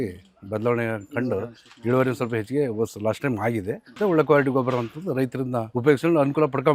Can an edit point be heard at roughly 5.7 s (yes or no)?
yes